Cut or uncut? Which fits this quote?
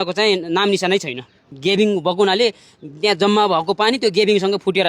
cut